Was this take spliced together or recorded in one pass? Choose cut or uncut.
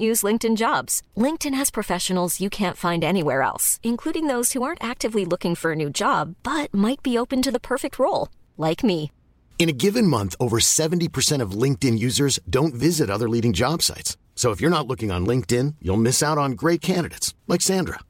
uncut